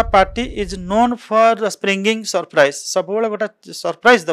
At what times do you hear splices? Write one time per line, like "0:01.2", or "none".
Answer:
none